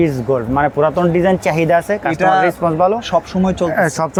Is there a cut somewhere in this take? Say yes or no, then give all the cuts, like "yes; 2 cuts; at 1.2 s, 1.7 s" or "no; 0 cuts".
no; 0 cuts